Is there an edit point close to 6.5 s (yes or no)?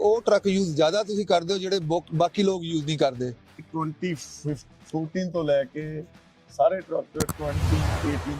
no